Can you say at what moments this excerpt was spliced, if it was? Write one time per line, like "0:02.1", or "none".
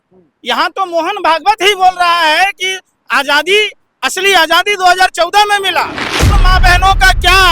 0:06.3